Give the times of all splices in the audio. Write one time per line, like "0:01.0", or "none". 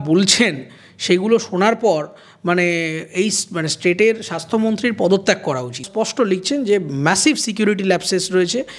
0:05.9